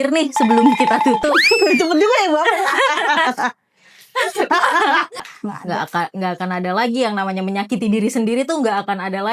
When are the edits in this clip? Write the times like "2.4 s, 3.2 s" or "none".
5.3 s